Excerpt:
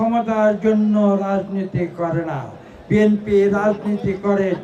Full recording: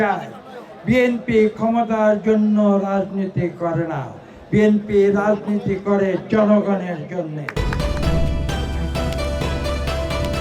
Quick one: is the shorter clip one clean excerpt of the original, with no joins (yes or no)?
yes